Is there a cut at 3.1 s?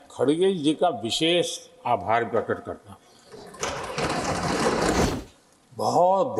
no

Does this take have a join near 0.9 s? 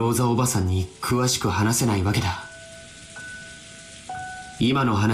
no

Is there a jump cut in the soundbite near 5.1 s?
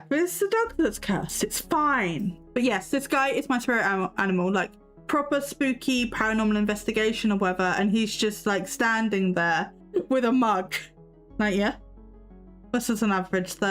no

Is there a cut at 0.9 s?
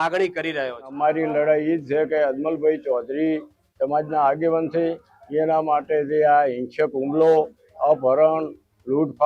yes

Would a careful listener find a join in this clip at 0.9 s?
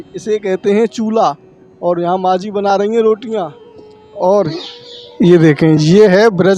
no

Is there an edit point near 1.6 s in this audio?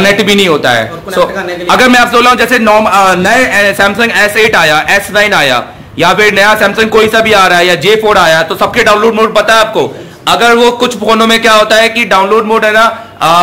yes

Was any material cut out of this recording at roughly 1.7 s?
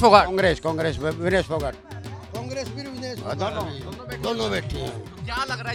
no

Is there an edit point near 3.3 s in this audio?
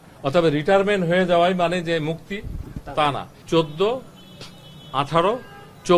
yes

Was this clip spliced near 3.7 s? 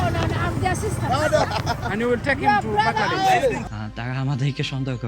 yes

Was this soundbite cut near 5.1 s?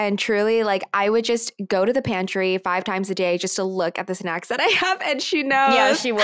no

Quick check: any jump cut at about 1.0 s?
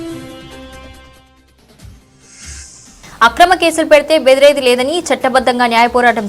yes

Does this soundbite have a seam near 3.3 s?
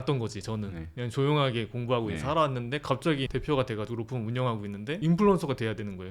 yes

